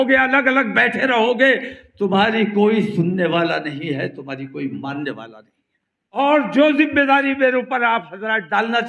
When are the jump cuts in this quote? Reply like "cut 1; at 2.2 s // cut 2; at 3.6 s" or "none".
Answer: cut 1; at 6.2 s